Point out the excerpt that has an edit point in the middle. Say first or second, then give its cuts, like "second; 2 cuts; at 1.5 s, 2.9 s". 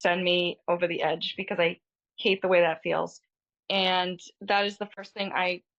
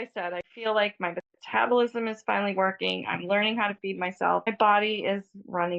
second; 1 cut; at 4.4 s